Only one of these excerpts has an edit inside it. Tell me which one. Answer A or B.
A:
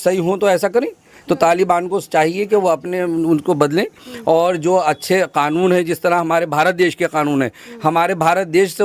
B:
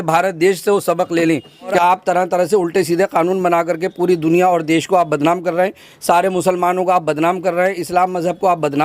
B